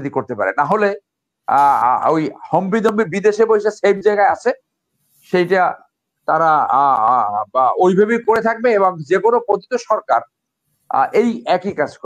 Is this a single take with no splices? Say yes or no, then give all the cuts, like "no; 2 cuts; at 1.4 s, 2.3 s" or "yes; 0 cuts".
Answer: yes; 0 cuts